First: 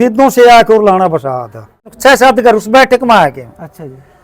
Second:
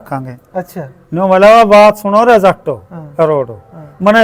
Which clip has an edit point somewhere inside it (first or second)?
first